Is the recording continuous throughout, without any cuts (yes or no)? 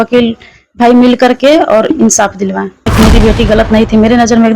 no